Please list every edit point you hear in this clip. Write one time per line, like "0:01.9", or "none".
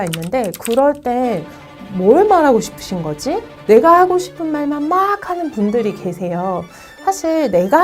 0:01.8
0:03.5

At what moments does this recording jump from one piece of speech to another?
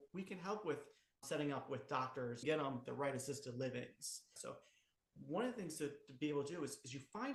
0:01.2
0:02.4
0:04.3

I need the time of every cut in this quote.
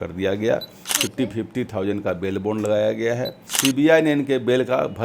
0:03.4

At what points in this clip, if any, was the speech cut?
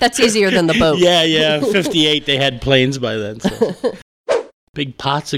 0:04.1

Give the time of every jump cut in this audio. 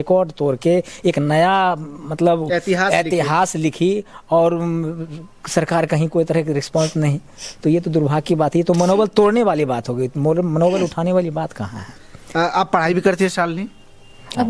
none

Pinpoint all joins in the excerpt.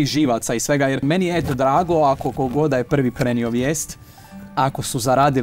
0:01.0

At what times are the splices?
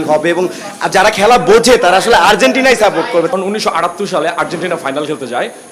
0:03.3

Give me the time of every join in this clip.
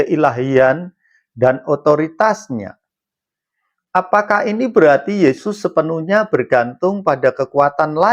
none

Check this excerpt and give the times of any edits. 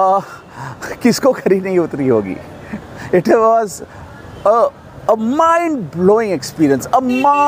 none

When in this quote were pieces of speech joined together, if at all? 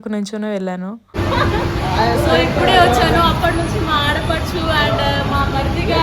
0:01.0

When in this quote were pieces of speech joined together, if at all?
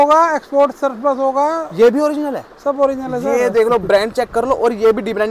none

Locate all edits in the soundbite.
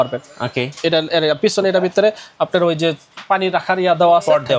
none

